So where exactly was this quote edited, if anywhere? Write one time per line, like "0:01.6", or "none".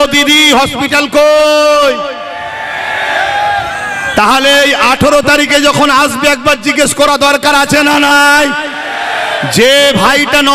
none